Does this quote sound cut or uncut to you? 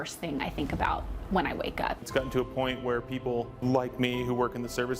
cut